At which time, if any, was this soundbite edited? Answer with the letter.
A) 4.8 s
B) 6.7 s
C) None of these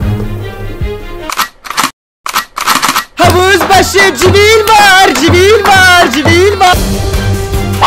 B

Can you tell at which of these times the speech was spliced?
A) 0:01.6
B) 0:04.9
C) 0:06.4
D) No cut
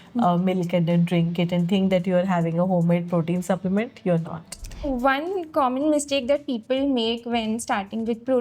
B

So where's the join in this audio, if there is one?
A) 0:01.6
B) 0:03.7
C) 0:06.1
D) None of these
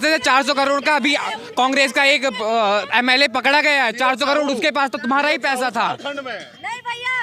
D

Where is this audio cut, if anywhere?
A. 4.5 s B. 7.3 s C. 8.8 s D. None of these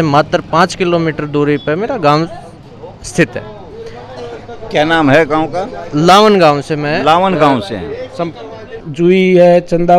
C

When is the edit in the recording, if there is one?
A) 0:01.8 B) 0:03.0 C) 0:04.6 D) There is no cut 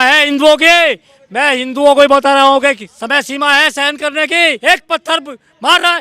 C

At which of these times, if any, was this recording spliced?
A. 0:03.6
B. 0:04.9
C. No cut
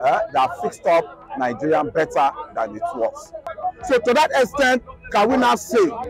A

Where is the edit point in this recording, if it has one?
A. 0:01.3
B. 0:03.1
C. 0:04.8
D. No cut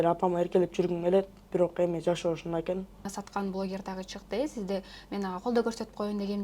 B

